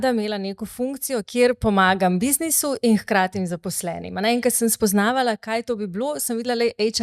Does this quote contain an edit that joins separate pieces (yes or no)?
no